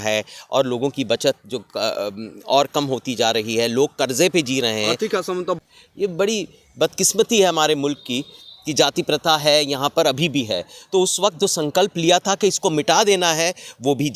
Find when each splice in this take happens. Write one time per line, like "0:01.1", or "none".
0:05.6